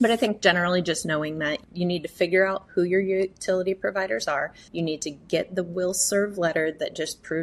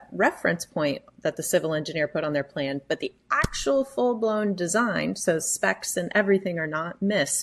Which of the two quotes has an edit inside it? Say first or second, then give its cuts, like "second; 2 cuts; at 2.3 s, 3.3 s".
first; 2 cuts; at 1.6 s, 4.6 s